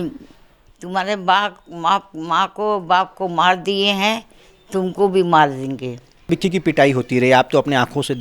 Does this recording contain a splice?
yes; 1 cut; at 6.3 s

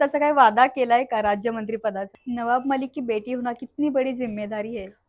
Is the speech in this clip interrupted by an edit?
yes; 1 cut; at 2.1 s

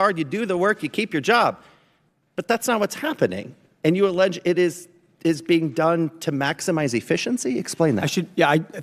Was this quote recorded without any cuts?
yes; 0 cuts

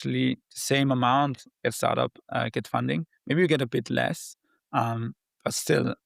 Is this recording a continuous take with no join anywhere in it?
yes; 0 cuts

